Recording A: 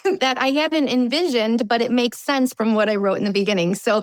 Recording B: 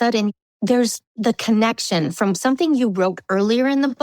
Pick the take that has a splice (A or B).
B